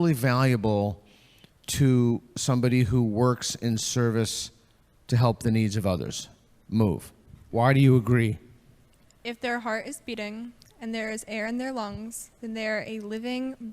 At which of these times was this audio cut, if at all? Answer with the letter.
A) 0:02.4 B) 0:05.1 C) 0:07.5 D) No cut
C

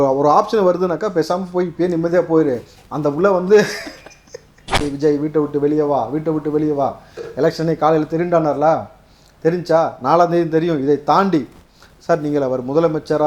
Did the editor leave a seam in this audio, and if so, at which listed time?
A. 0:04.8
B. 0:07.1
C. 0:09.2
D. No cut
A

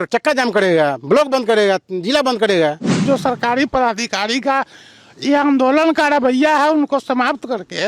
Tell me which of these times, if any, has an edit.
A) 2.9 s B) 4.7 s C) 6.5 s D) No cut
A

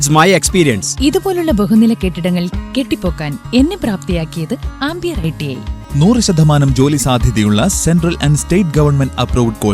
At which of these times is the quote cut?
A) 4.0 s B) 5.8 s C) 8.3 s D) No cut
B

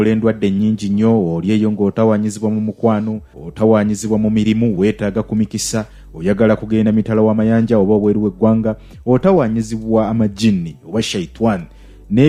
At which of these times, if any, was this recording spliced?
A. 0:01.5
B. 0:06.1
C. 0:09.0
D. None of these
D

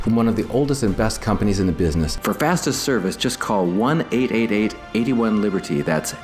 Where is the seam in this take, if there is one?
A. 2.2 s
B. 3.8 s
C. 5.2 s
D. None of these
A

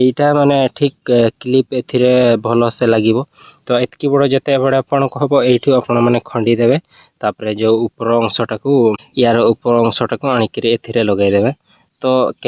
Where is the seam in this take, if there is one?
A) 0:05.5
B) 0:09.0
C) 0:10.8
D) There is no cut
B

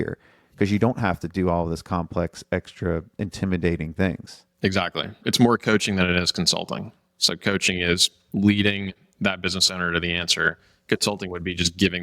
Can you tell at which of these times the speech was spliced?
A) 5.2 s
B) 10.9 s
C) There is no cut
A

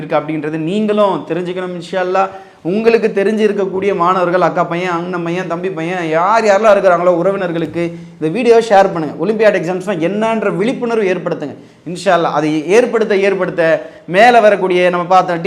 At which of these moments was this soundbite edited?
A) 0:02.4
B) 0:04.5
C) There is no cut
C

